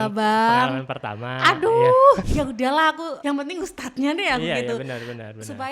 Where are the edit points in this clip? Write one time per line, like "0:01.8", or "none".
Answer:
0:02.3
0:03.1